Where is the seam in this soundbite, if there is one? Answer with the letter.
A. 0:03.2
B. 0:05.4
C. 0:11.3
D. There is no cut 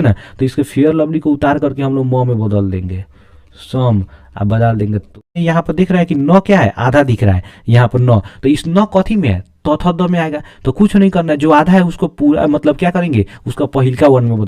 B